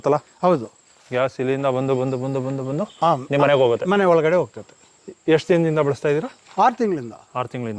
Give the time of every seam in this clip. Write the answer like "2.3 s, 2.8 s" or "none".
none